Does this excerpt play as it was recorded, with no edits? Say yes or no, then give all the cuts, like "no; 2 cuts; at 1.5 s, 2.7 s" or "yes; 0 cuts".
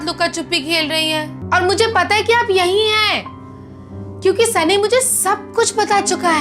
no; 1 cut; at 1.4 s